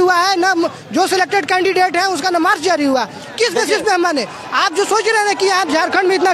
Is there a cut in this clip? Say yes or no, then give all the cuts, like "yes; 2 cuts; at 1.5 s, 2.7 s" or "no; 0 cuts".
no; 0 cuts